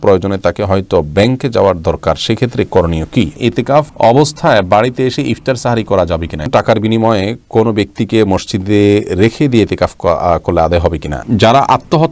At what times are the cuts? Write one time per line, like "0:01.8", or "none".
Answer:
0:03.8
0:06.5
0:11.2